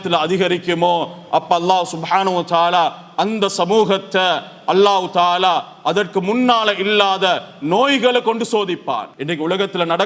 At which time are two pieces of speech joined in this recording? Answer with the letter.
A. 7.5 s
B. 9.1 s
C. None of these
B